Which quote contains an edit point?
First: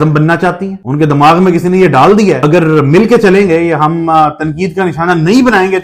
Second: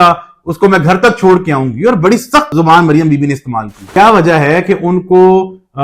second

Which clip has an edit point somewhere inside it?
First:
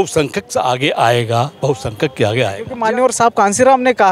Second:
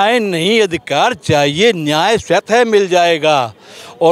first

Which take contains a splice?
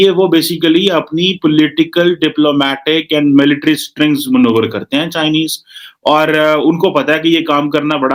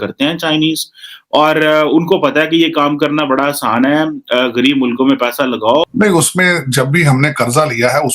second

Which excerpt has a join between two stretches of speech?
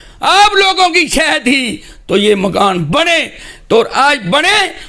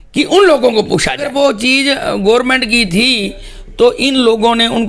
second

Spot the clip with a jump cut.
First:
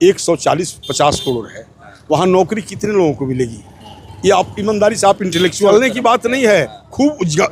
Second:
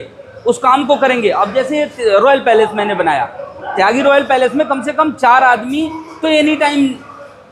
first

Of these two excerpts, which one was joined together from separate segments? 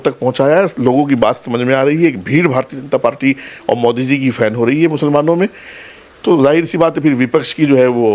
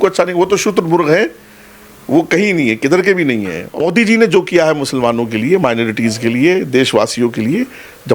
second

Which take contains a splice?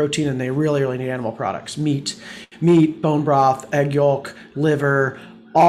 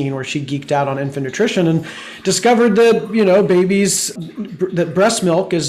second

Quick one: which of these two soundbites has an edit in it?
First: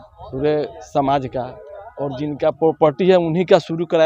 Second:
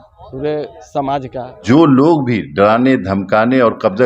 second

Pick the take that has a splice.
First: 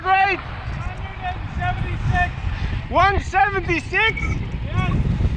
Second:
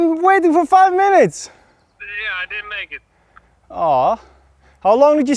second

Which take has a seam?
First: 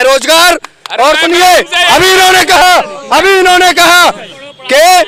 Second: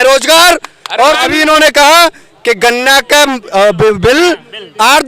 second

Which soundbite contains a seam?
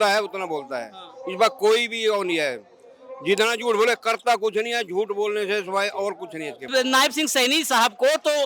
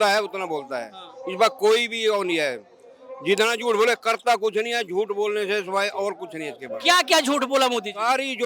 first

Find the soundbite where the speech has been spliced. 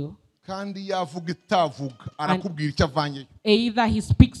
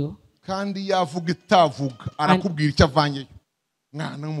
second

